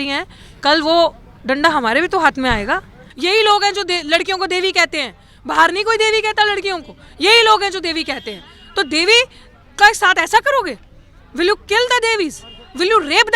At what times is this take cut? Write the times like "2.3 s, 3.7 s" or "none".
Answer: 3.0 s

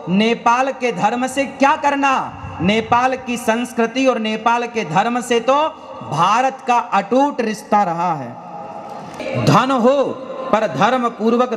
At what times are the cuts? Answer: 9.2 s

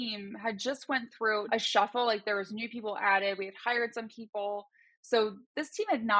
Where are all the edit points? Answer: 1.4 s

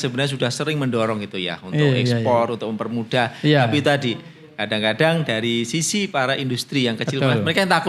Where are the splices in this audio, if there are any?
none

